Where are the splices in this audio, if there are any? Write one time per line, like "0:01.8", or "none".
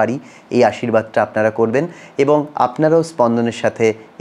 none